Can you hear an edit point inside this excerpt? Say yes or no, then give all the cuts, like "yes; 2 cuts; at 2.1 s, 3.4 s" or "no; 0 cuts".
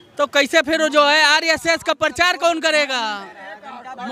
no; 0 cuts